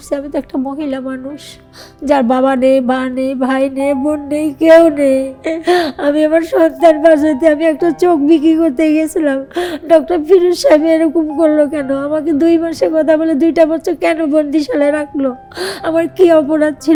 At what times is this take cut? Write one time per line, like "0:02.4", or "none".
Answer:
none